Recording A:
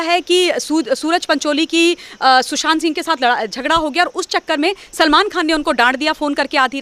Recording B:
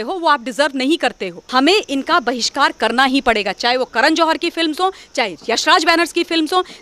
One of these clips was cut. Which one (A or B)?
B